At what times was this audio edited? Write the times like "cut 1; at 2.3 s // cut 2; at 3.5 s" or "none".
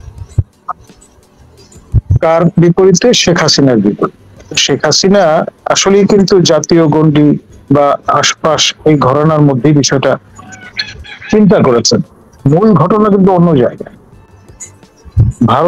none